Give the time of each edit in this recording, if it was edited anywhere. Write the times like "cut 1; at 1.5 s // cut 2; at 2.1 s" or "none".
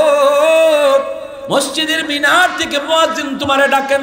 cut 1; at 1.3 s